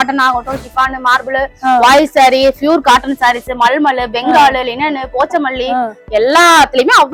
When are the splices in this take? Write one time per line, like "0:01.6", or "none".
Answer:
none